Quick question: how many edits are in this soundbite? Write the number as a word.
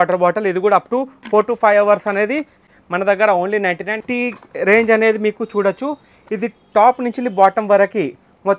two